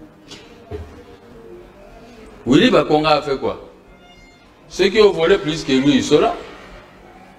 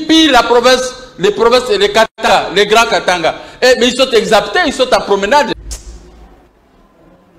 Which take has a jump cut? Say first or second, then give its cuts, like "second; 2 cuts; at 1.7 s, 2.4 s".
second; 1 cut; at 5.7 s